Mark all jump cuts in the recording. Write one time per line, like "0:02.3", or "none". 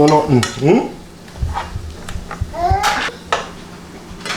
0:03.1